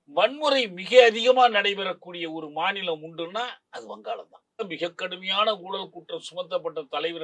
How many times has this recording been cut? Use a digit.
1